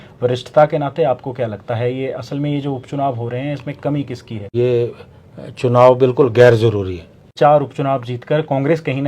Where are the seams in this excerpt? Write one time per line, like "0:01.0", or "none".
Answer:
0:04.4
0:07.3